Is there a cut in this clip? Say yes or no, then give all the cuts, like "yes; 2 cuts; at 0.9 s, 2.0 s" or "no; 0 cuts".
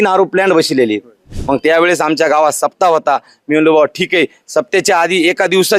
yes; 1 cut; at 1.3 s